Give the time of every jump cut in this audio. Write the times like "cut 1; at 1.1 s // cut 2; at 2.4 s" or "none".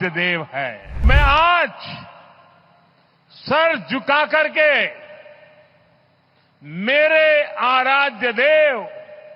cut 1; at 1.0 s